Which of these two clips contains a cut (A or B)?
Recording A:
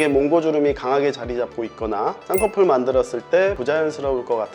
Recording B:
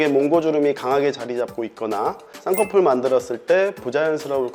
A